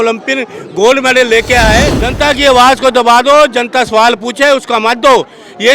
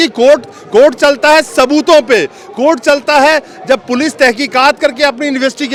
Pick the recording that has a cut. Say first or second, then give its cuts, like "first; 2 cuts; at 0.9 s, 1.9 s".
first; 1 cut; at 2.0 s